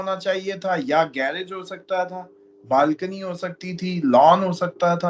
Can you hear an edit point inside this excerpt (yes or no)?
no